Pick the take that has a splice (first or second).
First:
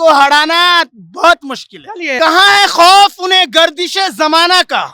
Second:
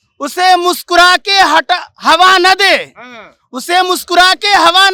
first